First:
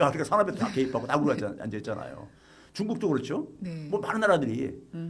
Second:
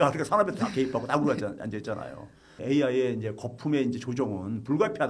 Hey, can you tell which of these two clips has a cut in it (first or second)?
second